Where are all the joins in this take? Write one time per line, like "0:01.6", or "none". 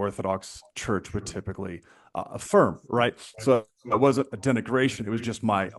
none